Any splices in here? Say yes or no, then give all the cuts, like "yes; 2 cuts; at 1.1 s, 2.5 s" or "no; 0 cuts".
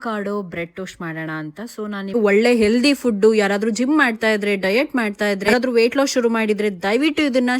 yes; 1 cut; at 2.1 s